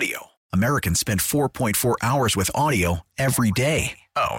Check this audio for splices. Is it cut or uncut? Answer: uncut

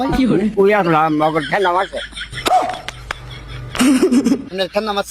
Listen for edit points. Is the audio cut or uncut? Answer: uncut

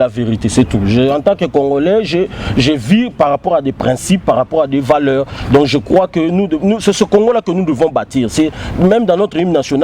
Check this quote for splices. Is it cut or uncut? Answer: uncut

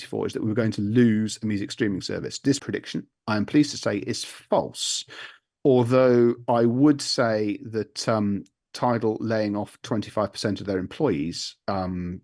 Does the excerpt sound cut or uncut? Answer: cut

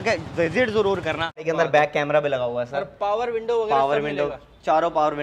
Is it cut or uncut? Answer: cut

